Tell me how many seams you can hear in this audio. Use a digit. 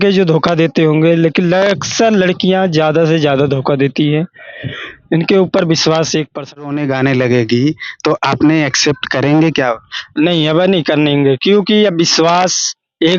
1